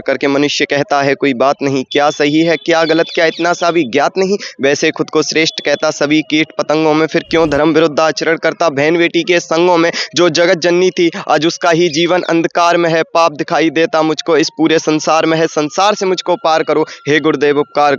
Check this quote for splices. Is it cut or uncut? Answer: uncut